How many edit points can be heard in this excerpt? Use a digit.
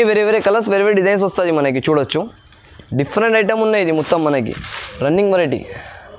0